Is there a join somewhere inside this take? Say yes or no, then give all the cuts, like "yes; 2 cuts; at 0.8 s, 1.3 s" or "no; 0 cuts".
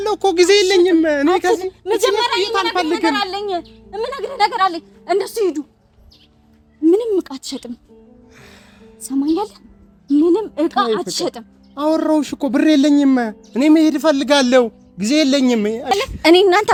no; 0 cuts